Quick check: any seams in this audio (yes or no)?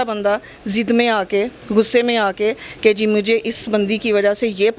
no